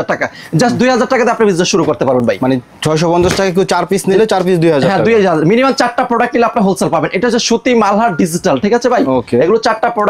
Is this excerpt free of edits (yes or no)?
yes